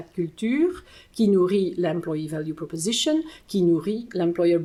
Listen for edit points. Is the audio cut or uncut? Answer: uncut